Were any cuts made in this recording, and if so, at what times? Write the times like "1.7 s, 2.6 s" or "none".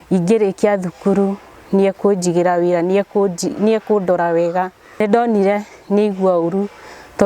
5.0 s